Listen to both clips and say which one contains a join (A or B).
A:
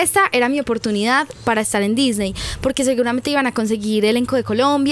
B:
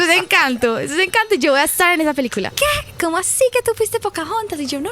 B